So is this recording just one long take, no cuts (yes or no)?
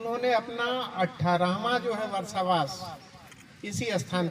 yes